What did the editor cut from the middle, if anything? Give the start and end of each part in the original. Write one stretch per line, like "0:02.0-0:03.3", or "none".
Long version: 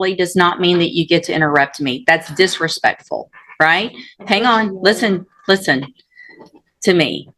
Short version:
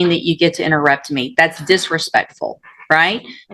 none